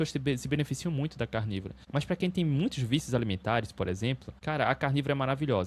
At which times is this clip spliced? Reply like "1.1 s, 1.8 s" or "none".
1.8 s, 4.3 s